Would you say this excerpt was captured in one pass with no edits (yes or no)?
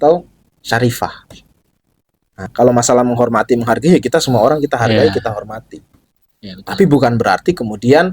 no